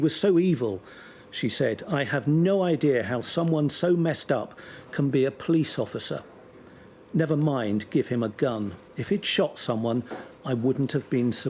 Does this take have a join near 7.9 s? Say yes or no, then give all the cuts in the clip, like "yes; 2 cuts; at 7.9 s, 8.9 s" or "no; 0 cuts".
no; 0 cuts